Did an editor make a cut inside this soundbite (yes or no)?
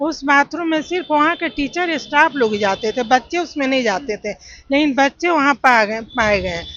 no